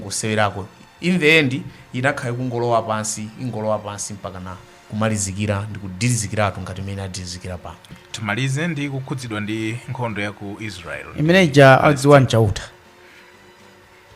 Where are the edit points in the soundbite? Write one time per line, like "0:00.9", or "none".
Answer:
0:07.9